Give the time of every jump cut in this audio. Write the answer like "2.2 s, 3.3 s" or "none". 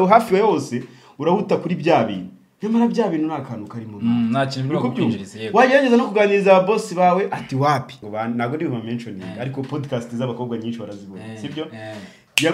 8.0 s